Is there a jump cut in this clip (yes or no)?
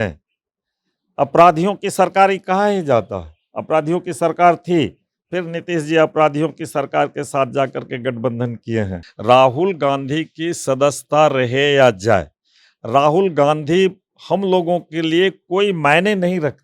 yes